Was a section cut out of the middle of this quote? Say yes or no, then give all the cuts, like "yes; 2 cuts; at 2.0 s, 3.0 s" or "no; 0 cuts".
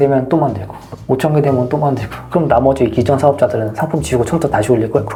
no; 0 cuts